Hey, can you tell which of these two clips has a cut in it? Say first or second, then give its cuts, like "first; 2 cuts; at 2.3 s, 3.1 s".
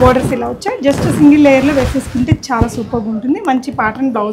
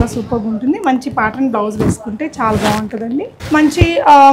second; 1 cut; at 3.4 s